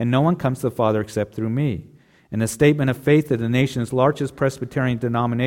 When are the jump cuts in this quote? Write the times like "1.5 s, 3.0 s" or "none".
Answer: none